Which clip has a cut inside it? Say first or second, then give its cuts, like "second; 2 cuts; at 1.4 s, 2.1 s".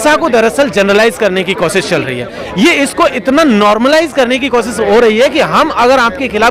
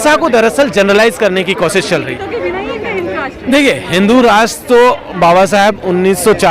second; 1 cut; at 2.2 s